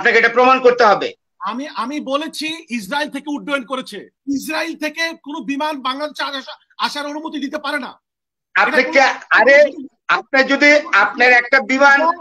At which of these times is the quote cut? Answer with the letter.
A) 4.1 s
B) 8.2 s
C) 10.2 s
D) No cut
A